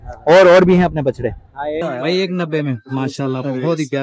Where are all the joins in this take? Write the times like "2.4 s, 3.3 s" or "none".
1.8 s